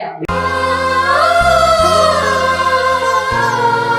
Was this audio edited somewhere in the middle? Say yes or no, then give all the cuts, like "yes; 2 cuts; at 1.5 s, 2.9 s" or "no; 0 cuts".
no; 0 cuts